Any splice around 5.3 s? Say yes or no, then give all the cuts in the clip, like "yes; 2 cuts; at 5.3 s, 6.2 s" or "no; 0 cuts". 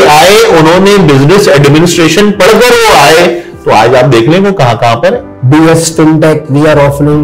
yes; 1 cut; at 5.3 s